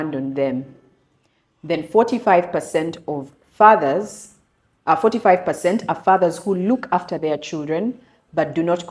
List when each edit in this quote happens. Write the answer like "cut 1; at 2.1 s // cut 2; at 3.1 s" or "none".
none